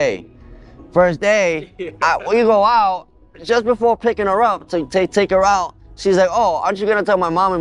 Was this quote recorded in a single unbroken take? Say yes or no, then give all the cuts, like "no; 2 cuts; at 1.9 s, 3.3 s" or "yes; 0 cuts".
yes; 0 cuts